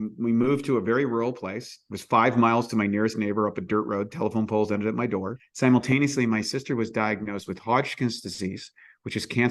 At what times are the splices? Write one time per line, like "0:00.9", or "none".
0:05.4